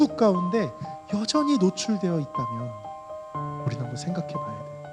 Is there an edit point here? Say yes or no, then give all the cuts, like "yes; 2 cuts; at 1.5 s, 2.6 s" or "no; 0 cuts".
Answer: no; 0 cuts